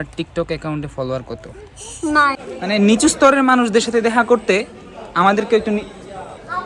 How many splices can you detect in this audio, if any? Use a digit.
1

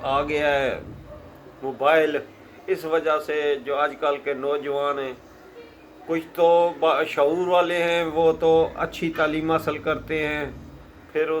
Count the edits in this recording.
0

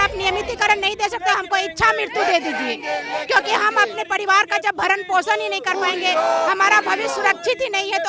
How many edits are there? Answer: 0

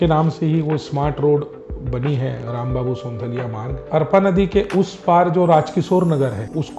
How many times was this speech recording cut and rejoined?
1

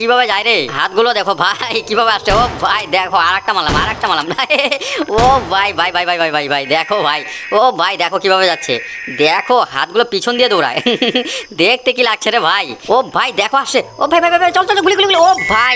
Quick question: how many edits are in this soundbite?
1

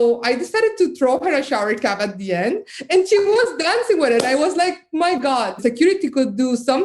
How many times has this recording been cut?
1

